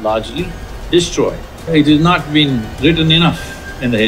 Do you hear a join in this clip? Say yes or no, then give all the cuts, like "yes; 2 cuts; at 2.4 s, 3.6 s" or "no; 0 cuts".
yes; 2 cuts; at 1.7 s, 2.7 s